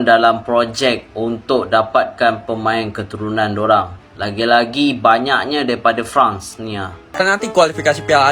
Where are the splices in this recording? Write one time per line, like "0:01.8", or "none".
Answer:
0:07.1